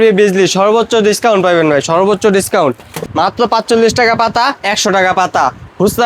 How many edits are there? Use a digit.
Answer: 1